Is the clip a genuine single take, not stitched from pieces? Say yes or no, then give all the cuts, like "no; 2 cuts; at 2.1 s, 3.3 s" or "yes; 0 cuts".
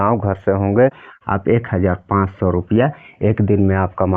no; 1 cut; at 1.1 s